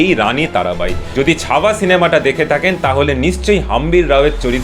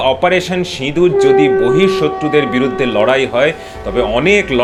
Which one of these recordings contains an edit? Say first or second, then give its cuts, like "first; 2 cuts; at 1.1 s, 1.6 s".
first; 1 cut; at 1.0 s